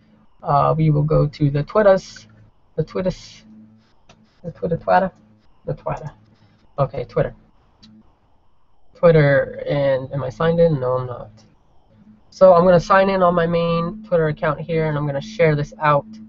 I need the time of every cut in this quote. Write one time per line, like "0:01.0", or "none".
none